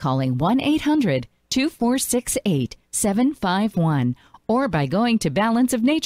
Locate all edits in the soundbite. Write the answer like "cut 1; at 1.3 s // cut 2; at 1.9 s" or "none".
none

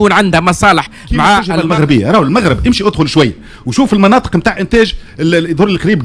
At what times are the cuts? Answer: cut 1; at 1.5 s

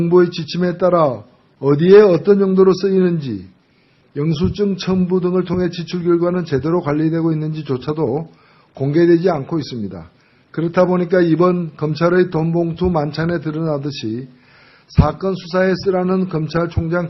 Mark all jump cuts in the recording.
cut 1; at 6.8 s

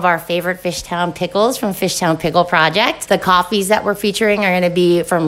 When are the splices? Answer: none

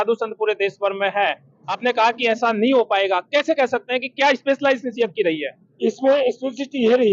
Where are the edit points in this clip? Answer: none

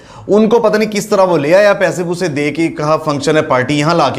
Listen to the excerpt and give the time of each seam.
none

